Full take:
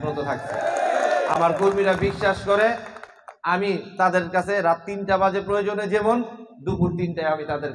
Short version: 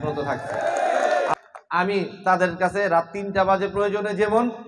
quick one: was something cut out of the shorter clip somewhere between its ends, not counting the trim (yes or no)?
yes